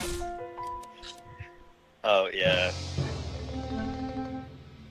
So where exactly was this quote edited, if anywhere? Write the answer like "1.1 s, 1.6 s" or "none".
none